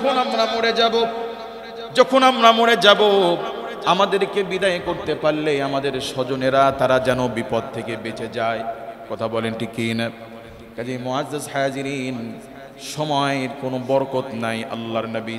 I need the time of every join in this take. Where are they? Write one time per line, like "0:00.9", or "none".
none